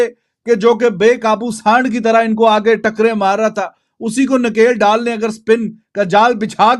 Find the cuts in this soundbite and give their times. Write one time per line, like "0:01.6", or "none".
0:00.9